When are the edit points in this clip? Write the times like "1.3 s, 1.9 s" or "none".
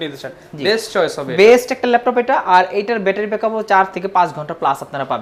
none